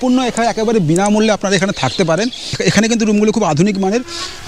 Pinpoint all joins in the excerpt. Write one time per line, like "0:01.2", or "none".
0:02.5